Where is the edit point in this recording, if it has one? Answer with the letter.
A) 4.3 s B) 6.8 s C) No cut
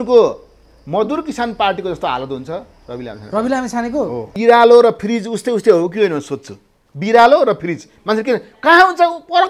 A